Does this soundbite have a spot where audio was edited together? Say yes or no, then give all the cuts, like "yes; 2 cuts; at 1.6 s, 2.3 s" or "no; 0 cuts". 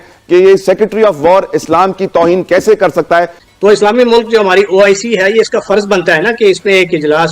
yes; 1 cut; at 3.4 s